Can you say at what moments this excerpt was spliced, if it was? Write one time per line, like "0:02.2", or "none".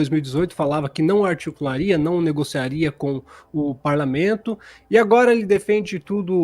none